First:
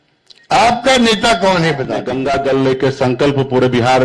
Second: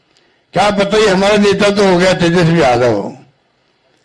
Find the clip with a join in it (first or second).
first